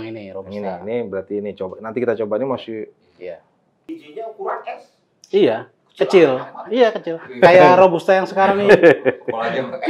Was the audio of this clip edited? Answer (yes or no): yes